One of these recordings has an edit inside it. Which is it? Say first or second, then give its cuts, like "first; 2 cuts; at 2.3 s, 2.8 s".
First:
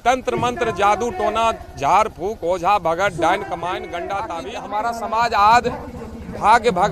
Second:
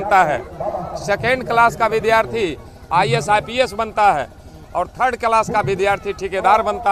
first; 1 cut; at 4.5 s